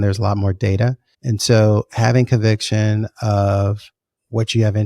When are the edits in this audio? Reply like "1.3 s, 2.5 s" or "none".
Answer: 1.1 s